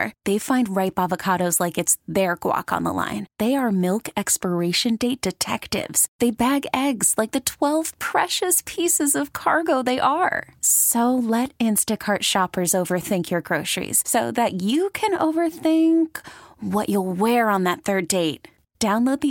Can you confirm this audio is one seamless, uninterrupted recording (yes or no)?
yes